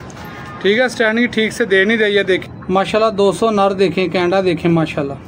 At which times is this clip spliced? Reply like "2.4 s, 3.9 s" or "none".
2.4 s